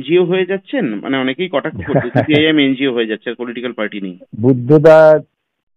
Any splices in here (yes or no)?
yes